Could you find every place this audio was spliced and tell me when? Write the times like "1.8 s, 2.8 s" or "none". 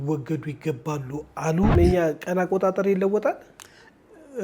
1.7 s